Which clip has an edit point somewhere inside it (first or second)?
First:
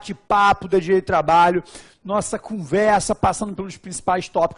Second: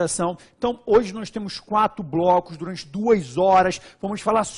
second